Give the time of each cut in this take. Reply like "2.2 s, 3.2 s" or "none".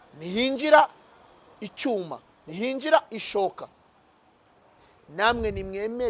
none